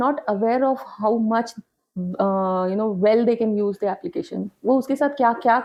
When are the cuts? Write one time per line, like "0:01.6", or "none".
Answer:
none